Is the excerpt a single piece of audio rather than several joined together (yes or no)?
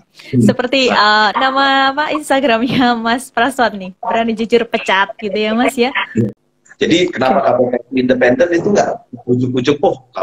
no